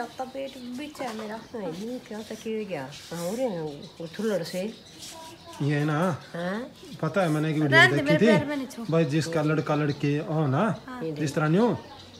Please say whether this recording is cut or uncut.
uncut